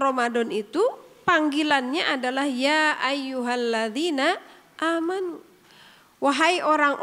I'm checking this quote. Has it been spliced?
no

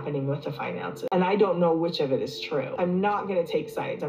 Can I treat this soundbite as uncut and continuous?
no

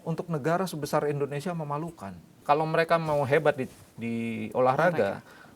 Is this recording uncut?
no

